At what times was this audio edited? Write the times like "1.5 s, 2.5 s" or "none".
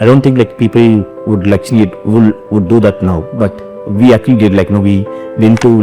1.2 s